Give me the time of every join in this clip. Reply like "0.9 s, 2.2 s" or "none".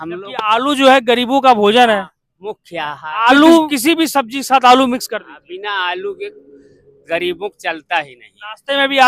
3.7 s